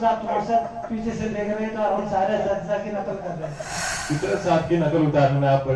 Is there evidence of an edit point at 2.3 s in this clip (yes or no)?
no